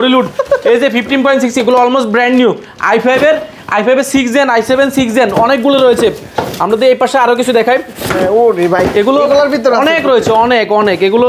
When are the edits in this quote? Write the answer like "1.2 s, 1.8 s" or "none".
none

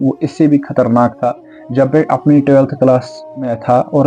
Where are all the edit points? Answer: none

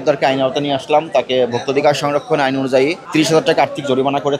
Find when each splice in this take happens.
3.0 s

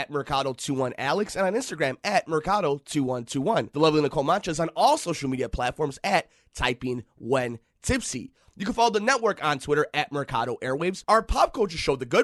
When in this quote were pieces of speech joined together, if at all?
none

